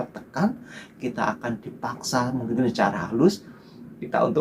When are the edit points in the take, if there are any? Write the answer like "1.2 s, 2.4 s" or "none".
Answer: 2.5 s